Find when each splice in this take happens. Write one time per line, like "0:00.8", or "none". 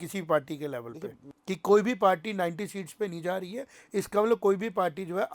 0:01.2